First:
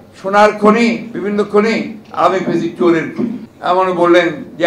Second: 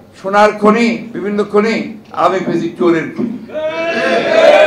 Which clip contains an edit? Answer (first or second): first